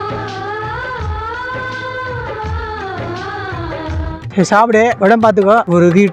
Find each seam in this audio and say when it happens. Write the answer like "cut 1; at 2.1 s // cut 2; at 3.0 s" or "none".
cut 1; at 4.2 s